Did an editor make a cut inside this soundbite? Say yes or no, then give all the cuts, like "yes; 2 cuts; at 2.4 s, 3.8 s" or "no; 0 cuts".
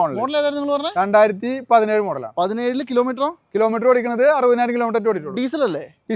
no; 0 cuts